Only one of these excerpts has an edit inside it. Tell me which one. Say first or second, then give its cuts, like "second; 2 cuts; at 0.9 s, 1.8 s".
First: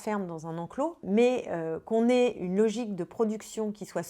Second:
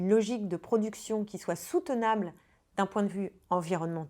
first; 1 cut; at 1.0 s